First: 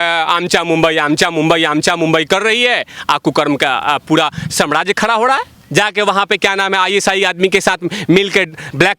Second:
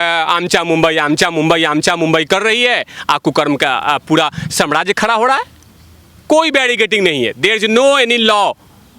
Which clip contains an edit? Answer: first; 1 cut; at 5.6 s

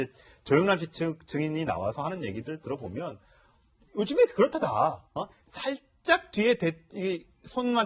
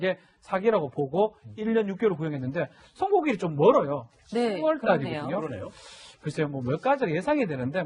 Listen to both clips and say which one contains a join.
first; 1 cut; at 2.6 s

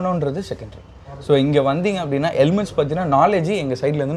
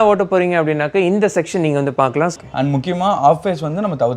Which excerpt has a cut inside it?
second; 1 cut; at 2.3 s

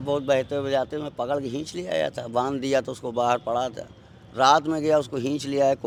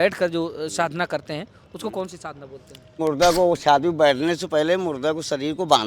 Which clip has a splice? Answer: second; 1 cut; at 3.0 s

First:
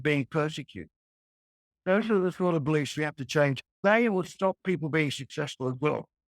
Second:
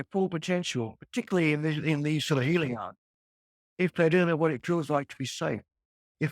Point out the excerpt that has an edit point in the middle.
first; 2 cuts; at 1.6 s, 3.7 s

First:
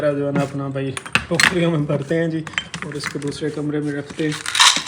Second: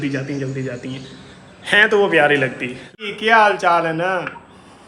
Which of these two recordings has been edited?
second; 1 cut; at 2.9 s

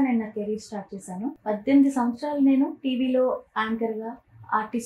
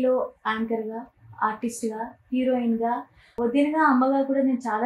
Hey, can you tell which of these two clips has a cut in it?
first; 1 cut; at 1.4 s

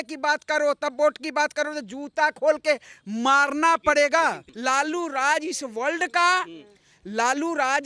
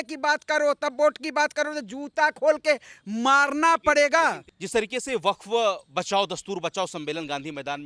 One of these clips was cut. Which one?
first; 1 cut; at 4.5 s

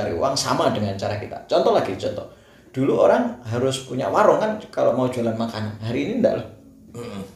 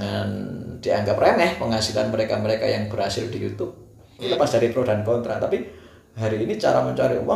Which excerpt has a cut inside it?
second; 1 cut; at 4.3 s

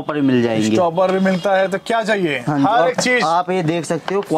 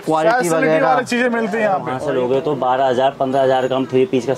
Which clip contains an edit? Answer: second; 1 cut; at 1.9 s

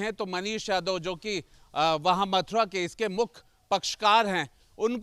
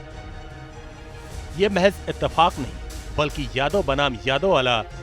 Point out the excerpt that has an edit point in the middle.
second; 1 cut; at 1.3 s

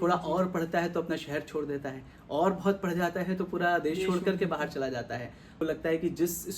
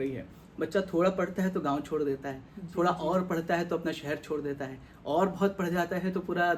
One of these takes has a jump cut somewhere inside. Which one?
first; 1 cut; at 5.6 s

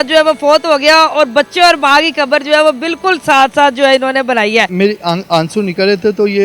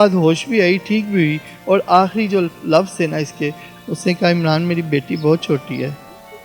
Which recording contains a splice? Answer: first; 1 cut; at 4.7 s

